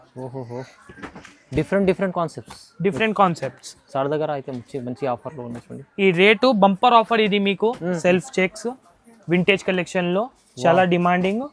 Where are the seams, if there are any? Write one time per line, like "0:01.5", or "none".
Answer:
0:08.0